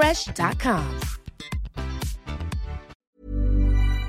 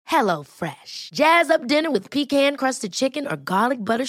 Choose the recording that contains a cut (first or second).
first